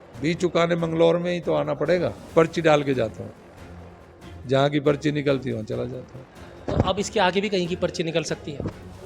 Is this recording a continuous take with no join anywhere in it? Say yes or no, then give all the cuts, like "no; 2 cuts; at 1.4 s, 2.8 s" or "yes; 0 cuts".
no; 1 cut; at 2.3 s